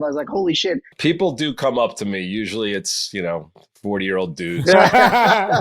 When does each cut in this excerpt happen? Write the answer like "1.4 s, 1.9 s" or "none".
0.9 s, 4.6 s